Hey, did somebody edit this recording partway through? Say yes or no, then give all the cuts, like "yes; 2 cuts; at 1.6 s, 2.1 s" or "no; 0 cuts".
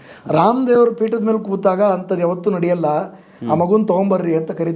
no; 0 cuts